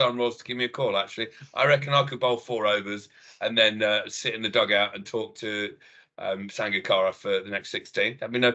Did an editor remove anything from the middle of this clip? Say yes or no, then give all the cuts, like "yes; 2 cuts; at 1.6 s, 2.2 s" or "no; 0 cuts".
no; 0 cuts